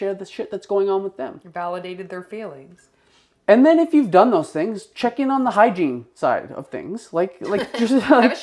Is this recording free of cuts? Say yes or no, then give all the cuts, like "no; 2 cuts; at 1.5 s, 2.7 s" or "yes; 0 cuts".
yes; 0 cuts